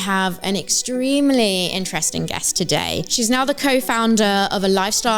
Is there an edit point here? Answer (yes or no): yes